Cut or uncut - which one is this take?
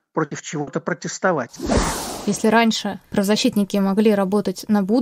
cut